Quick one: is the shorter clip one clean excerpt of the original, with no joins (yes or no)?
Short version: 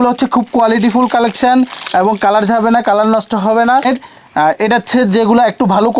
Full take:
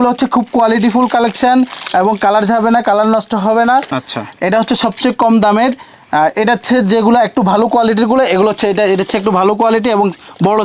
no